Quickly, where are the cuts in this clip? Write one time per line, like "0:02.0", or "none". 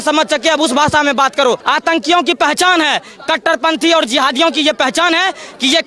0:01.6